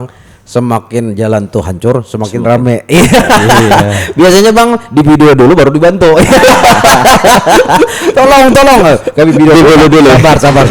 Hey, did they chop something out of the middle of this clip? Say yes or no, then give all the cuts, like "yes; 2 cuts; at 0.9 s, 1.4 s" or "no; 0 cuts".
no; 0 cuts